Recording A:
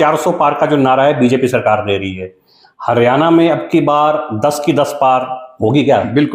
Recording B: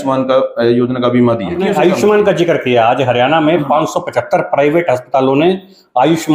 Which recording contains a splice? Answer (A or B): B